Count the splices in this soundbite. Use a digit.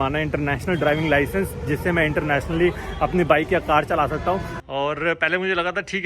1